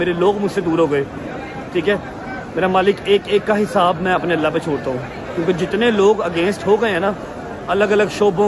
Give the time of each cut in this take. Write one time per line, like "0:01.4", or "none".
none